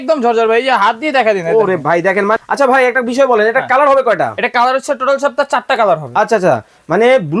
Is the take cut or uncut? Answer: cut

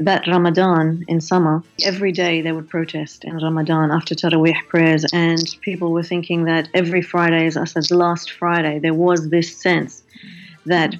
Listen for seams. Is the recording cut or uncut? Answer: cut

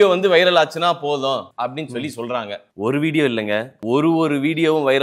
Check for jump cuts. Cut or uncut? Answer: cut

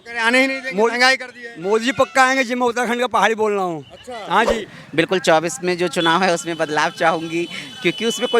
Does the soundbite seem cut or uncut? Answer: cut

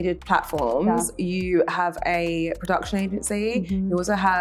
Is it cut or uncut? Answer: uncut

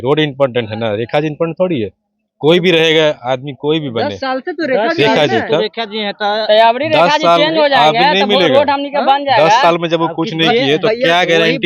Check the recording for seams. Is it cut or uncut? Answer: uncut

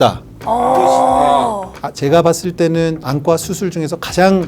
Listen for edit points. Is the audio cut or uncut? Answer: cut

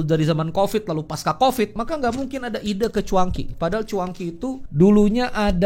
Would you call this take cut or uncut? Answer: cut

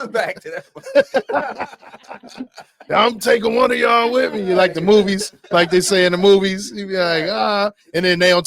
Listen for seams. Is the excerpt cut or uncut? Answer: uncut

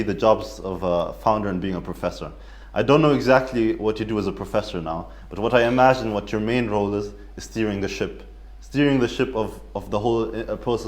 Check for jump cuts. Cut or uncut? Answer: uncut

